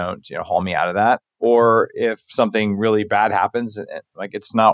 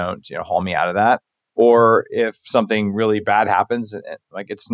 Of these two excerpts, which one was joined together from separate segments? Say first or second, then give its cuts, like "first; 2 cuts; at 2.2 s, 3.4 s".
first; 1 cut; at 1.3 s